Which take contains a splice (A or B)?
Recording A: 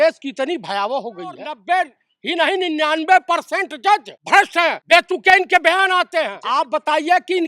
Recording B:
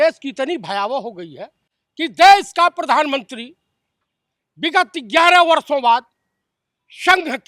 A